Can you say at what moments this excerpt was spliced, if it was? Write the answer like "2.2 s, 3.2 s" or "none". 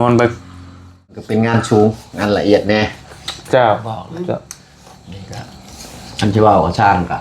1.2 s